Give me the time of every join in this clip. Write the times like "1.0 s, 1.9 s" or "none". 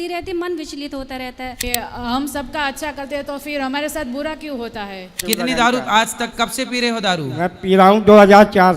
1.6 s, 5.2 s